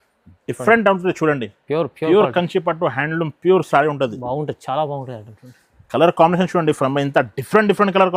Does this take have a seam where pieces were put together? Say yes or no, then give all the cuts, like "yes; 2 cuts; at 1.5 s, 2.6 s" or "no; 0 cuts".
no; 0 cuts